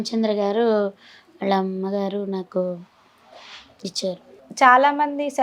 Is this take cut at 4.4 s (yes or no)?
yes